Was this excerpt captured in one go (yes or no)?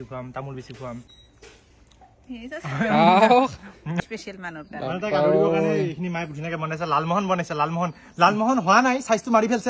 no